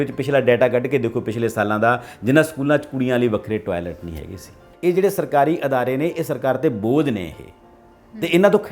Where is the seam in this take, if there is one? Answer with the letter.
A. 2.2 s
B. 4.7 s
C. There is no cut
B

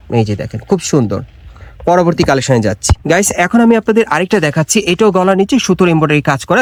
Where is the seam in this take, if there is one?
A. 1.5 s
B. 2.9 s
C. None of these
C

